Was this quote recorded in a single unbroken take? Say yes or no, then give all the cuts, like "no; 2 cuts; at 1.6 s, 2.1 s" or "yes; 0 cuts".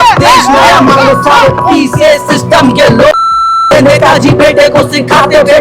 yes; 0 cuts